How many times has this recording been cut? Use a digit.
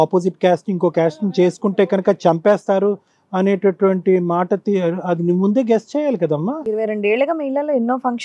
0